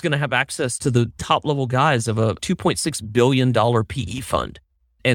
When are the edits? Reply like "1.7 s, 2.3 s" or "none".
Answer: 0.9 s, 2.4 s